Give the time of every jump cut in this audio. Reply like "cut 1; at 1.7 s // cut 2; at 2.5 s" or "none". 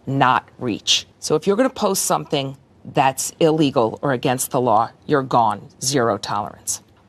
none